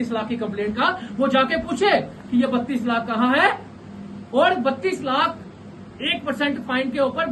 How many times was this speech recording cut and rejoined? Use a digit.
0